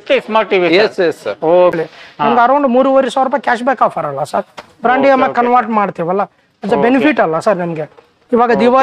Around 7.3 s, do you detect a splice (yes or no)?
no